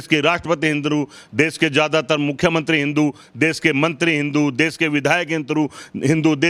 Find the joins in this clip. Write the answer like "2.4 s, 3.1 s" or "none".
none